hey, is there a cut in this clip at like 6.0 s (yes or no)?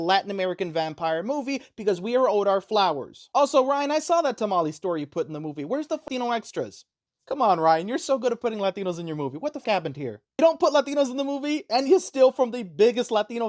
yes